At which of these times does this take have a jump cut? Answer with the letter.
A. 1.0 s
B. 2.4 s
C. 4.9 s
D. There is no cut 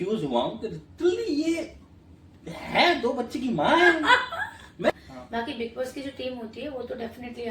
C